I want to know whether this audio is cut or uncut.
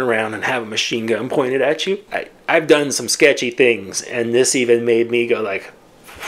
cut